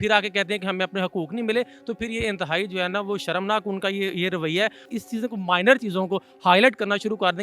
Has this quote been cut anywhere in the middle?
yes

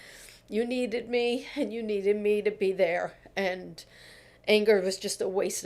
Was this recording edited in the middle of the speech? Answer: no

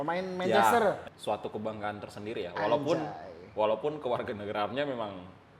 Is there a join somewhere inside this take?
yes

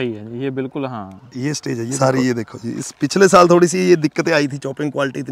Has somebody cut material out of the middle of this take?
yes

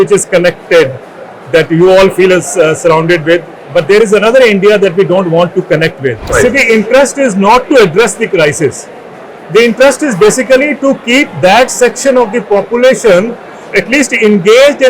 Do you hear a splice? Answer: yes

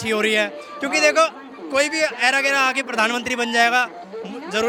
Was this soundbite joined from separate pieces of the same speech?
no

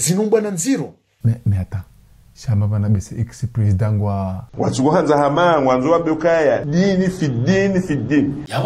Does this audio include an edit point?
yes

